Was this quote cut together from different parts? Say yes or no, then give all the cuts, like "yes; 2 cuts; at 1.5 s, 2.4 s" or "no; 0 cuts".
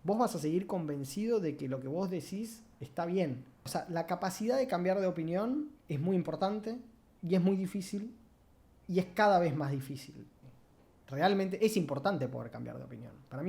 yes; 2 cuts; at 3.7 s, 10.3 s